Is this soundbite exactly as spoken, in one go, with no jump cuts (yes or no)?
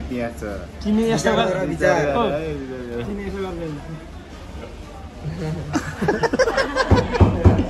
yes